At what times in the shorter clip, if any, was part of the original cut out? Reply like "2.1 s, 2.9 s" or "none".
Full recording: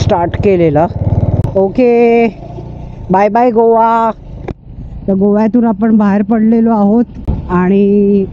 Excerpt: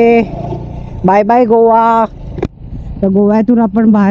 none